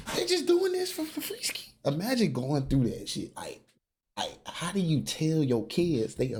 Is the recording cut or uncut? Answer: uncut